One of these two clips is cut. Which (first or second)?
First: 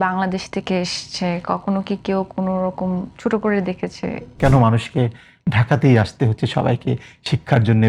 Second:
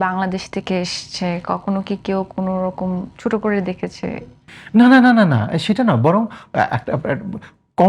first